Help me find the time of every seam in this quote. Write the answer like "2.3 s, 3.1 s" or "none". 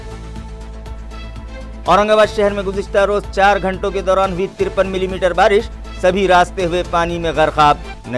none